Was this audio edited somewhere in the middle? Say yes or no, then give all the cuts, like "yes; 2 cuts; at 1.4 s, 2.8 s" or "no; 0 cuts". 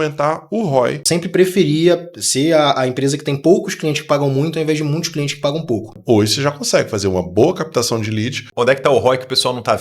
yes; 3 cuts; at 1.0 s, 6.0 s, 8.4 s